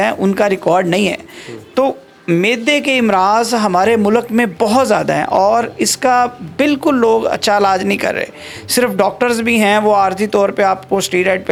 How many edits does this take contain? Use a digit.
0